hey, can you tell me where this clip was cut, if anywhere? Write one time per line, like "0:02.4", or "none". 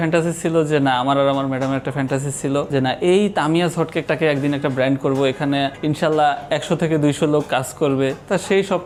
none

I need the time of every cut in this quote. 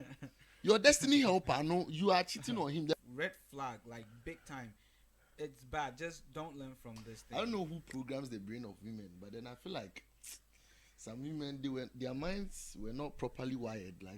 0:02.9
0:07.1

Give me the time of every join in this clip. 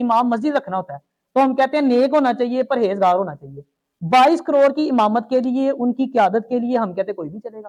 none

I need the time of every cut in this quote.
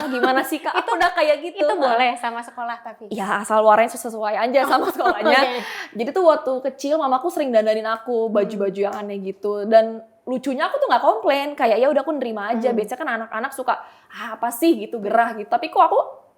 none

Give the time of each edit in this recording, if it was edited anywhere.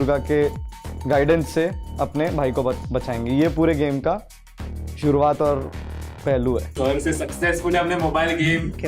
0:06.7

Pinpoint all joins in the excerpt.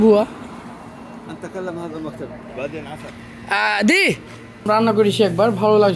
0:04.6

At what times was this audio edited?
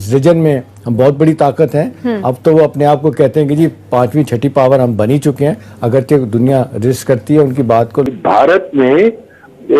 0:08.1

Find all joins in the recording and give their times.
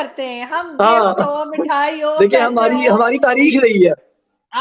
none

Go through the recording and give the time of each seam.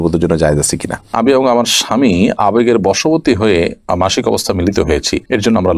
0:01.1

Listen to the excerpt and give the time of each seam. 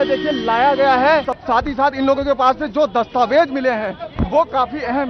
0:01.3

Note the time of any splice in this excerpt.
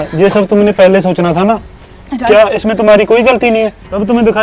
none

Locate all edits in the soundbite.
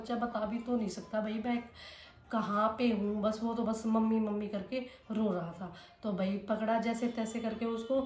none

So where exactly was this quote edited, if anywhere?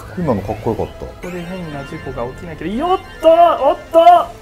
0:01.2

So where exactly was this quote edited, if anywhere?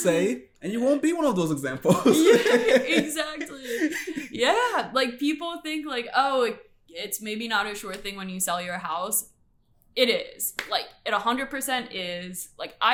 none

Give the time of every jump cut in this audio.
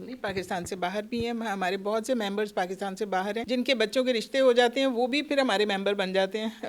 0:03.4

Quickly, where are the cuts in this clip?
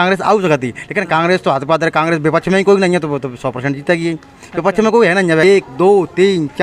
0:05.4

